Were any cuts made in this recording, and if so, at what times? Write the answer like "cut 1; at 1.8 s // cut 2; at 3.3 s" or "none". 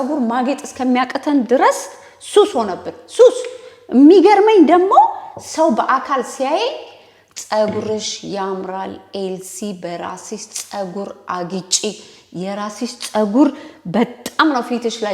none

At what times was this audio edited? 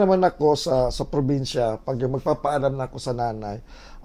none

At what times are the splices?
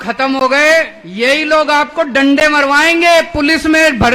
cut 1; at 1.0 s

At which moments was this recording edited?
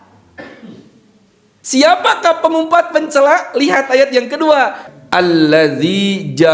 cut 1; at 4.9 s

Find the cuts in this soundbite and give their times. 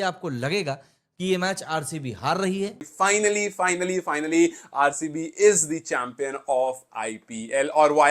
cut 1; at 2.9 s

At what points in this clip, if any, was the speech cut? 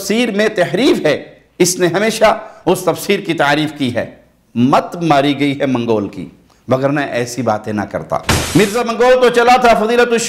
cut 1; at 8.5 s

